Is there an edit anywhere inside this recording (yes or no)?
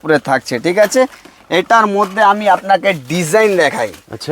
no